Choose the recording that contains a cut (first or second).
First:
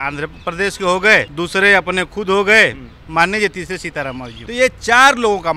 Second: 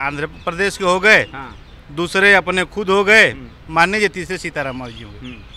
first